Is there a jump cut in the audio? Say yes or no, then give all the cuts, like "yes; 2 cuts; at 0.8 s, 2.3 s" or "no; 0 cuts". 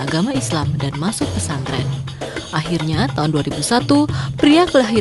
yes; 1 cut; at 3.8 s